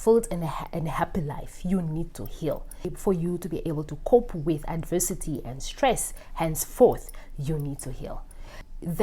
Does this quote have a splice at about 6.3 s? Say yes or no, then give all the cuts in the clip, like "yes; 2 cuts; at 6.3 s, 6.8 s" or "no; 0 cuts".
no; 0 cuts